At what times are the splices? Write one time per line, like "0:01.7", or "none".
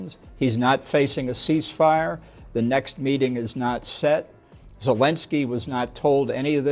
none